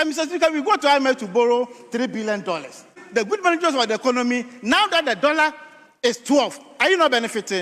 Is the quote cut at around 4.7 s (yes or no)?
no